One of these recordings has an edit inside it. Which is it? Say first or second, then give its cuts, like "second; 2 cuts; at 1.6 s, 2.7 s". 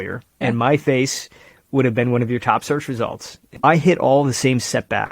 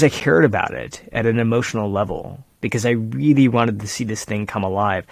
first; 1 cut; at 3.5 s